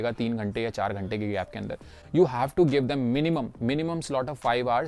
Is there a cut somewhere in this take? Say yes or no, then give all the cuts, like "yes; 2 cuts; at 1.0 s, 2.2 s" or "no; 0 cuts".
no; 0 cuts